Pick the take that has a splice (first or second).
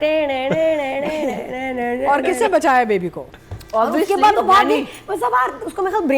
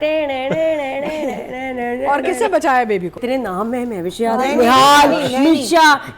second